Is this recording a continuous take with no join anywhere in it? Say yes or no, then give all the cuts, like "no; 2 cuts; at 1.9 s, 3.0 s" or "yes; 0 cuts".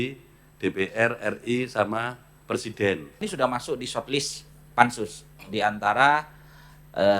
no; 1 cut; at 3.2 s